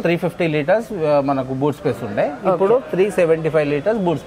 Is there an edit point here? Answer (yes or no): no